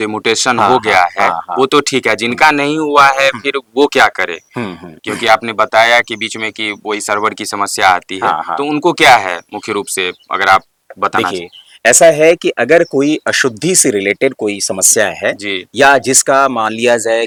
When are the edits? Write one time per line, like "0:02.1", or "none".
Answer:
none